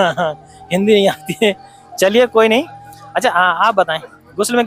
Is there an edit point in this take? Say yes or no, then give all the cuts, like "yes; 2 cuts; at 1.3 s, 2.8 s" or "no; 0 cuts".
no; 0 cuts